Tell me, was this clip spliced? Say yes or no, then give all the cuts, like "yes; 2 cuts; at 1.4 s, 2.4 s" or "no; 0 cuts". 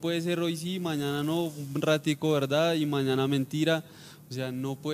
no; 0 cuts